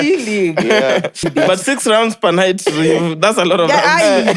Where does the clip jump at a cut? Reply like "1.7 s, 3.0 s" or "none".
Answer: 1.2 s